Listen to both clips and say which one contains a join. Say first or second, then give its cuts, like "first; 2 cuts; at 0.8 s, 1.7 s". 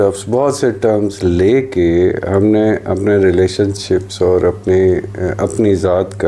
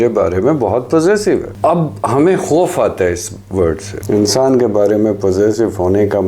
second; 2 cuts; at 1.5 s, 3.9 s